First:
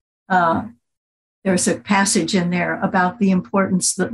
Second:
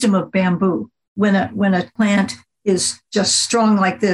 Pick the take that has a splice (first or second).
second